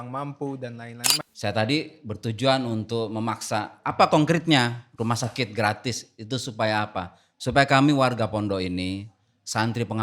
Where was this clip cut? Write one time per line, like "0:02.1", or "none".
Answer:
0:01.1